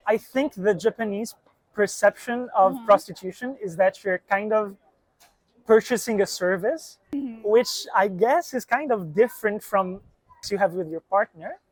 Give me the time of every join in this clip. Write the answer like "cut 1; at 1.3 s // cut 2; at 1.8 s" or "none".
none